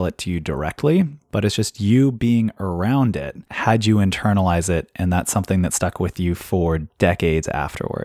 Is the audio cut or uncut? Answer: cut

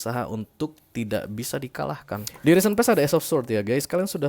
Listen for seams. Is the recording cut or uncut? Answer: cut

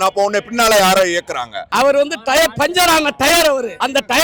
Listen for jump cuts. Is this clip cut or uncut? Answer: cut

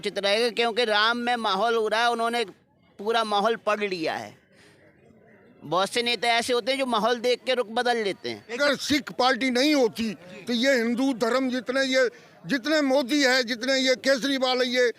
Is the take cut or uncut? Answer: cut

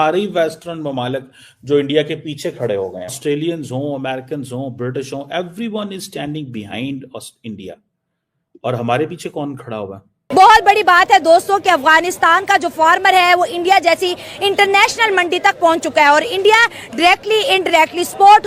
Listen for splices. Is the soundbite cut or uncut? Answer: cut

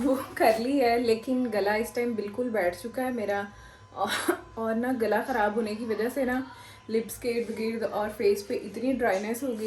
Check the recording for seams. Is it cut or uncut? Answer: uncut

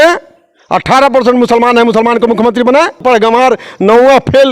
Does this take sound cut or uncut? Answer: cut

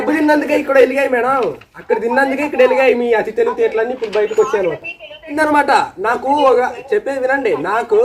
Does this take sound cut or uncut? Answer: cut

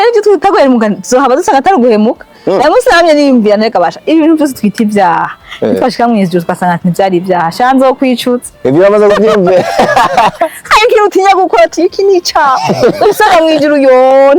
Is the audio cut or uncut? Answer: uncut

